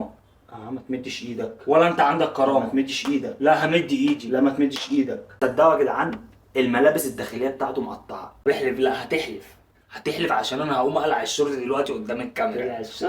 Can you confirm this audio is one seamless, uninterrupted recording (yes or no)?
no